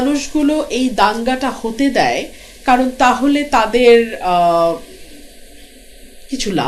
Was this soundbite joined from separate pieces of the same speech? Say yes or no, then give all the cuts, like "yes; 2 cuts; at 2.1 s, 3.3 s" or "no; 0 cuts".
no; 0 cuts